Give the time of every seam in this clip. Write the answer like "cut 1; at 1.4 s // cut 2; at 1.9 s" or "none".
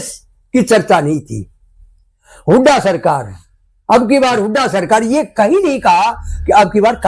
none